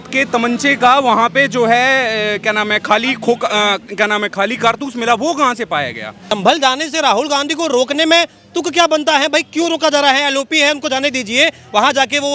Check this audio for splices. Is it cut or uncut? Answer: cut